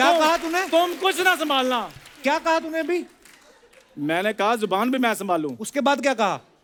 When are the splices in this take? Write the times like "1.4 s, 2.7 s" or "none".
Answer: none